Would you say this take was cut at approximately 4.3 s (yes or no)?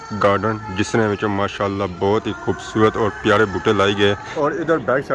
yes